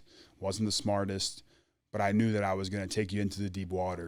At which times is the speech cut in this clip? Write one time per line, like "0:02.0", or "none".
none